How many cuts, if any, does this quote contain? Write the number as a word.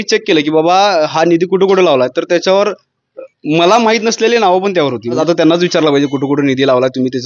one